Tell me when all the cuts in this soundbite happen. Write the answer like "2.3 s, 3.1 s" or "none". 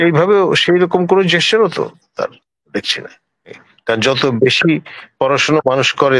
3.7 s